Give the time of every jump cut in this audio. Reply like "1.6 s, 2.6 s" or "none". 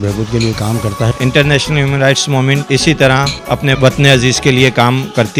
1.1 s, 3.7 s